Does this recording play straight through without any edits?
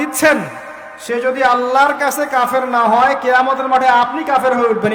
yes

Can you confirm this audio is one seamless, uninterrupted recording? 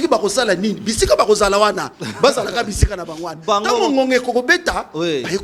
yes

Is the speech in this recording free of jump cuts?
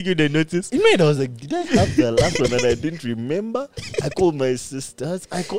yes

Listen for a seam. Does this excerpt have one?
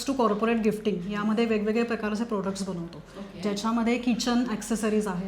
no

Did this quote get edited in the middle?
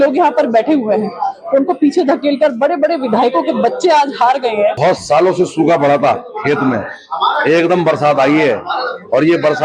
yes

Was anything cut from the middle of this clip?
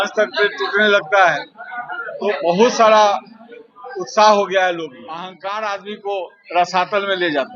yes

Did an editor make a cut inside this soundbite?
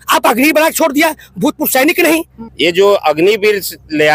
yes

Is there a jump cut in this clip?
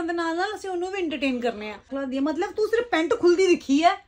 yes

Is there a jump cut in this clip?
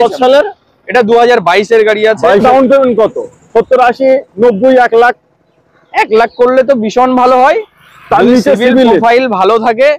yes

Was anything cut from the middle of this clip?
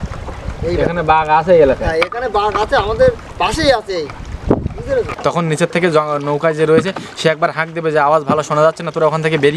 yes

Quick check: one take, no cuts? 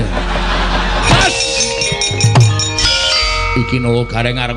no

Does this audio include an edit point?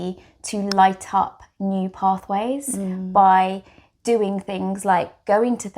no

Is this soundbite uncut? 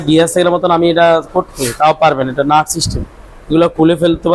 yes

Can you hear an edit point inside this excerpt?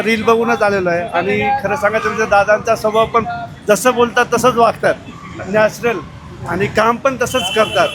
no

